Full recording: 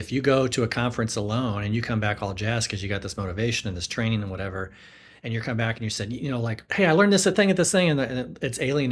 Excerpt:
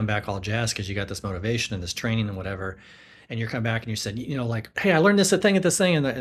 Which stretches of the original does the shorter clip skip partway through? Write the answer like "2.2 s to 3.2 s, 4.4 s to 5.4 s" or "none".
none